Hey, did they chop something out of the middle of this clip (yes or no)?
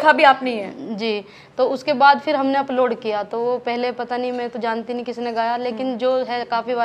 no